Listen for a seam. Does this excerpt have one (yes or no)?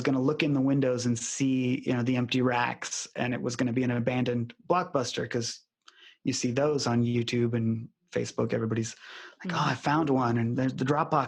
no